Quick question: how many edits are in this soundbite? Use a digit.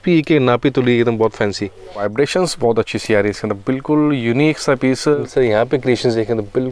2